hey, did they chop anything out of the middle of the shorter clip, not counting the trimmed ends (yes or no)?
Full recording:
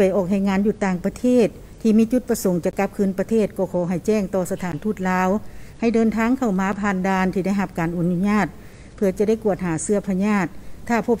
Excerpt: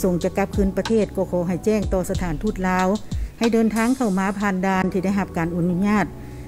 no